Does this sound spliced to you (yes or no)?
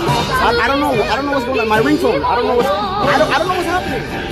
no